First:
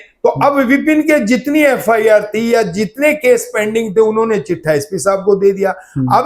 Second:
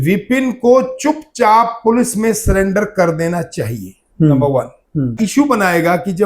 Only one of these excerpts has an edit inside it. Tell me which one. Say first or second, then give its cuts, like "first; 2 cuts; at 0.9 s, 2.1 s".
second; 1 cut; at 5.1 s